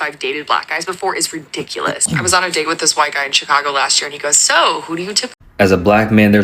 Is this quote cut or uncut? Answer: cut